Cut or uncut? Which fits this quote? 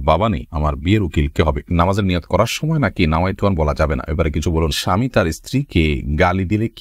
cut